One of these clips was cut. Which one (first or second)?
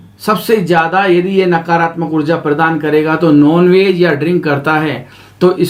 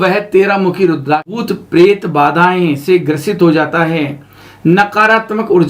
second